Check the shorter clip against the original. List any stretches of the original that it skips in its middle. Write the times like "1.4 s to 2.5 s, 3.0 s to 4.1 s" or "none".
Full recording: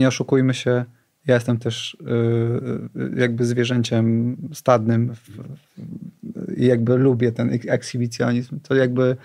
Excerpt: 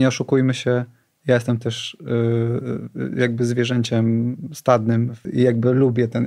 5.2 s to 6.4 s